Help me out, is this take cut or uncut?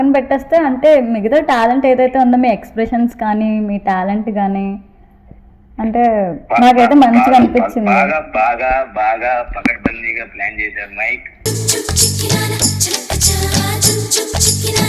uncut